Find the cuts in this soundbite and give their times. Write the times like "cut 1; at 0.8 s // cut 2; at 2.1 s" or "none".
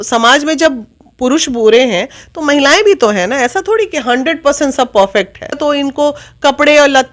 cut 1; at 5.6 s